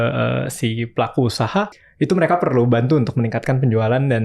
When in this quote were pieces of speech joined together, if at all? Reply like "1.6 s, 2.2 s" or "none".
1.7 s